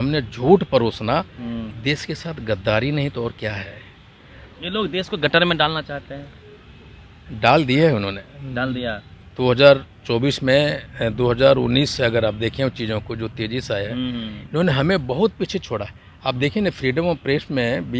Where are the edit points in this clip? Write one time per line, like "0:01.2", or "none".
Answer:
none